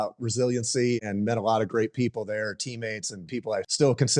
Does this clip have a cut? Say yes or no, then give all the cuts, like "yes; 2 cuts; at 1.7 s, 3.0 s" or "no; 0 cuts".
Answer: yes; 2 cuts; at 1.0 s, 3.3 s